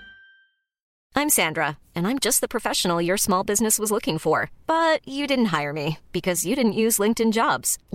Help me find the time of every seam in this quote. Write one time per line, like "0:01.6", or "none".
0:00.9